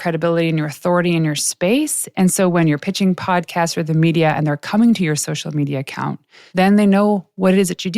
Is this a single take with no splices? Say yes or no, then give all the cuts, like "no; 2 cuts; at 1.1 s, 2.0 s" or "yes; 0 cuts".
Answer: no; 1 cut; at 6.3 s